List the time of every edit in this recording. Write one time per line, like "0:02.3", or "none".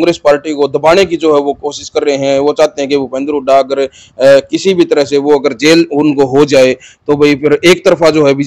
none